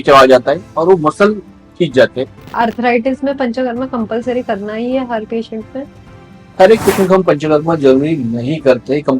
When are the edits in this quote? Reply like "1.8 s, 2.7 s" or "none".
2.5 s, 6.4 s